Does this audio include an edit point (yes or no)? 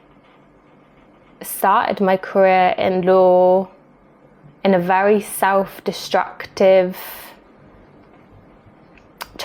no